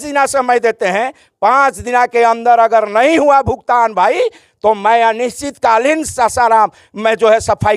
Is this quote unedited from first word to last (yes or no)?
yes